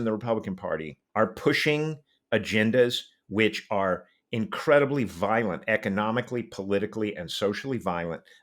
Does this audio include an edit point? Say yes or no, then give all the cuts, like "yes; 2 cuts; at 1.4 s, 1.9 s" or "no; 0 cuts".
yes; 1 cut; at 1.0 s